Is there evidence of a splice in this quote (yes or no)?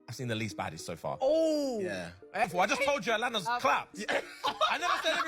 yes